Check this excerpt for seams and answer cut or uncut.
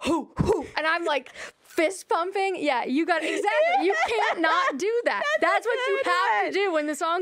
uncut